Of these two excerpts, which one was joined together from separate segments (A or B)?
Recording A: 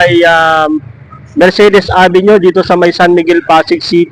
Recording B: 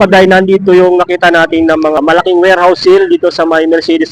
B